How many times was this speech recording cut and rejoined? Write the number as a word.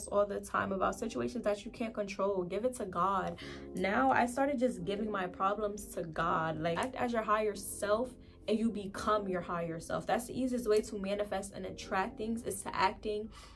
one